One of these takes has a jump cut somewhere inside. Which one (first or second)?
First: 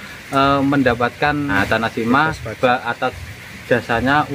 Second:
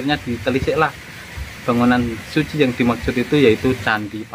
first